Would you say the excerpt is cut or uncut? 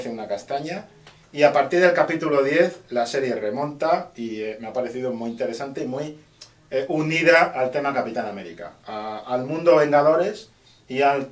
cut